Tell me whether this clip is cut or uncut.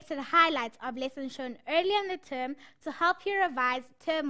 uncut